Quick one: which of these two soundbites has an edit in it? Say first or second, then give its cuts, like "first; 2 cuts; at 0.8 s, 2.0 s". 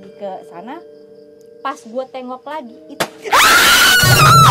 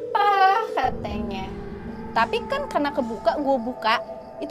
second; 1 cut; at 2.0 s